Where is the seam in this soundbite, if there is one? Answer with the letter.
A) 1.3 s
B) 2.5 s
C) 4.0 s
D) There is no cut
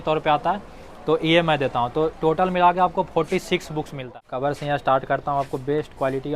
C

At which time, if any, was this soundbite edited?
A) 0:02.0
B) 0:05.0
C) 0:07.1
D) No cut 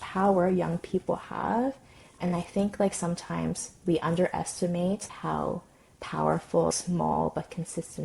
D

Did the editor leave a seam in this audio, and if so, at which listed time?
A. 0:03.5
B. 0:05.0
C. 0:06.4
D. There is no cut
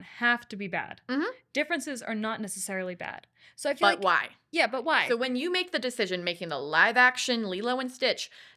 B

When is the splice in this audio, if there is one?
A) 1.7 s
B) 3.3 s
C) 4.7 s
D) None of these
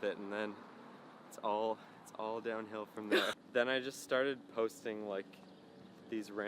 B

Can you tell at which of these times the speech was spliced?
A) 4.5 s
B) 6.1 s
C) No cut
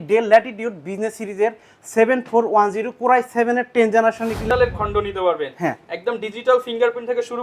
A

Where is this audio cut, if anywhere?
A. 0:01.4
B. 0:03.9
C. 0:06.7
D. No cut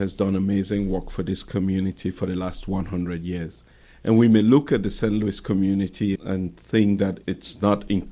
D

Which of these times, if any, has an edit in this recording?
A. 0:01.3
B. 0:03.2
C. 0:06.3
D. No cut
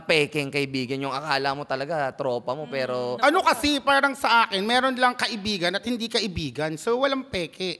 B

